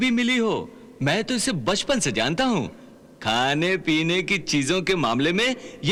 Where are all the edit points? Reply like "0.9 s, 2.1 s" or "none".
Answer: none